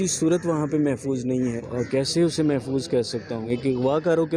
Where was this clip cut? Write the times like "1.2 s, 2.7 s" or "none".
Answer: 1.6 s, 3.4 s